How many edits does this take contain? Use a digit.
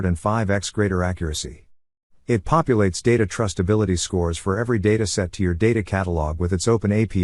0